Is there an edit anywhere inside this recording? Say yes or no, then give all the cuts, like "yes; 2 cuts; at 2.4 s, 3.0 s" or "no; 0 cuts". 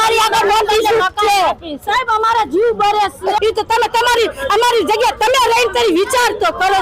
yes; 1 cut; at 3.4 s